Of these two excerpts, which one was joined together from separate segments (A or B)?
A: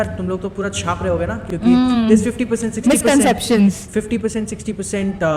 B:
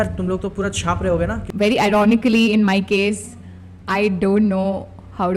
B